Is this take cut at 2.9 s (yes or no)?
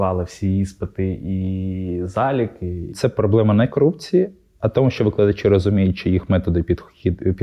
yes